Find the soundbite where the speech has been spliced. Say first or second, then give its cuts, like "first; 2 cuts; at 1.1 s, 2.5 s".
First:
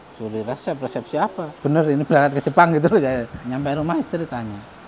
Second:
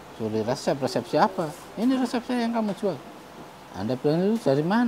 first; 2 cuts; at 1.5 s, 3.4 s